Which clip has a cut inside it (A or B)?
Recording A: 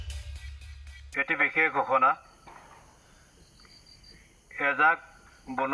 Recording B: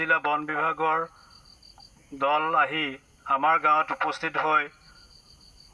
A